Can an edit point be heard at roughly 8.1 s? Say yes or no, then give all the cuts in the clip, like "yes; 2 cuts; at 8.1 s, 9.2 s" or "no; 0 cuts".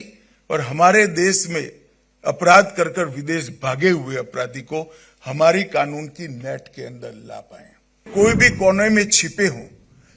yes; 1 cut; at 8.1 s